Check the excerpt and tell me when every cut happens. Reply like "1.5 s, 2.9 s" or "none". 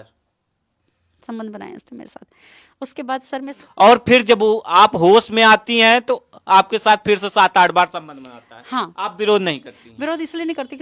none